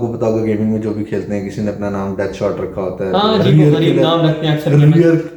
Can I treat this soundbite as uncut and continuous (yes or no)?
yes